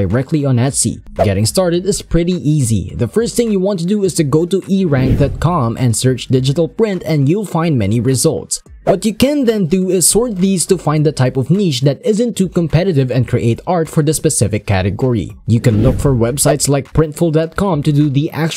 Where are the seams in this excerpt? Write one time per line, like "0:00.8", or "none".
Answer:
0:01.0
0:15.4

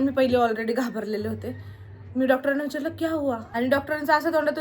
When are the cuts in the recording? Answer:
0:03.5

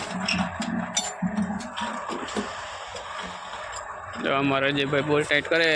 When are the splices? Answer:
none

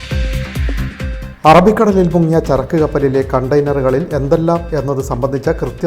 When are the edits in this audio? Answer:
none

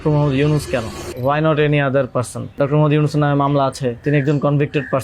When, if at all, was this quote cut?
0:01.0
0:02.5
0:04.0

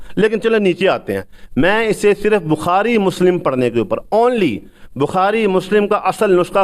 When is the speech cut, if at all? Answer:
none

